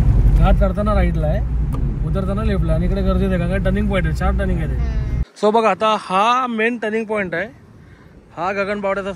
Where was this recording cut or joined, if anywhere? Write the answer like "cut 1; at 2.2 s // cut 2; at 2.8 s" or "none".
cut 1; at 5.2 s